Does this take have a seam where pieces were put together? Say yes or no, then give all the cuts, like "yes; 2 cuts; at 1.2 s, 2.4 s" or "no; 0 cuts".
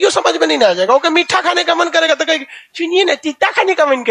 no; 0 cuts